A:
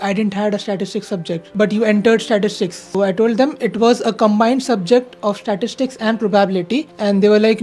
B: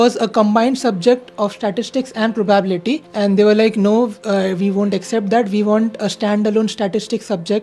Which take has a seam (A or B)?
A